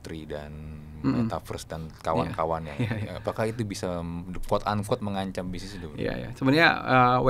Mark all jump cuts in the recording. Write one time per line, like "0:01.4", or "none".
none